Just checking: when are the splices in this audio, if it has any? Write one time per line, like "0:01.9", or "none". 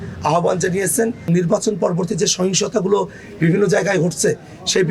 0:01.3